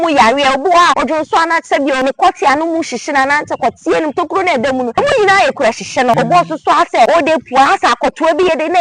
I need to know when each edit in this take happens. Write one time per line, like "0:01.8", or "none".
0:01.0
0:02.0
0:04.9
0:06.2
0:07.3